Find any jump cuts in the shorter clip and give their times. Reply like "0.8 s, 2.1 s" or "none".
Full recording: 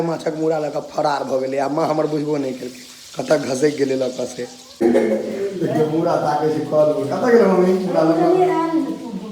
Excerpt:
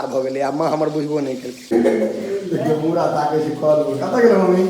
1.5 s